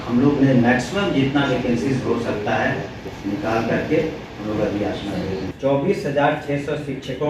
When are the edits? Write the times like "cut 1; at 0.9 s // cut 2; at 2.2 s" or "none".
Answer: cut 1; at 5.5 s